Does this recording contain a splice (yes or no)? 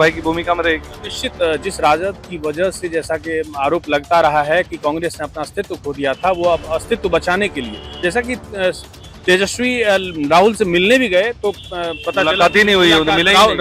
no